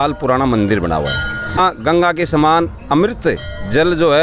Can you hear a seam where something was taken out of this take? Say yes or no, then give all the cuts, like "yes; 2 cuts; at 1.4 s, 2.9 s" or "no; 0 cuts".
yes; 1 cut; at 1.6 s